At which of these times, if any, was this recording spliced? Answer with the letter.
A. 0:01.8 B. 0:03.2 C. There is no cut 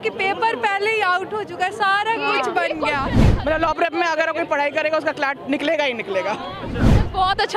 B